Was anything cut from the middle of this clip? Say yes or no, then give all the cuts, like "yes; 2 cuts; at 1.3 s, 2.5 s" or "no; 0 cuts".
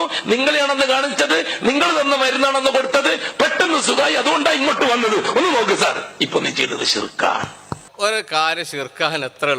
yes; 1 cut; at 7.8 s